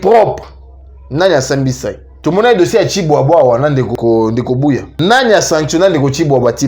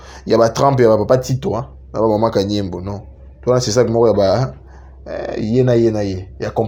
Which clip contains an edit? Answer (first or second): first